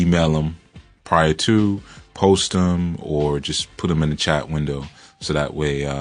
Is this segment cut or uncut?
cut